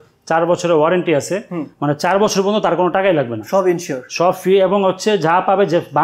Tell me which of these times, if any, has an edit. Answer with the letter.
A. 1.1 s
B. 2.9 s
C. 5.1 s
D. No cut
D